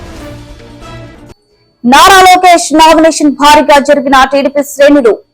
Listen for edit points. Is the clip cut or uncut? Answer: cut